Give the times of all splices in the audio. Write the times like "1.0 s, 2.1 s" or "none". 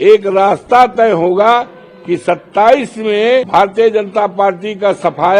3.5 s